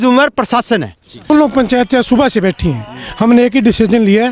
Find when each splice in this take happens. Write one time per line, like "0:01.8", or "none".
0:01.3